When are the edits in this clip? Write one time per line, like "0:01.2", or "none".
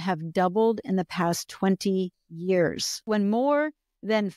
0:03.1